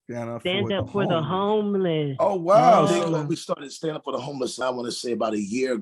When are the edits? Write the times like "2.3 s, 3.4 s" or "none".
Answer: 2.9 s, 4.6 s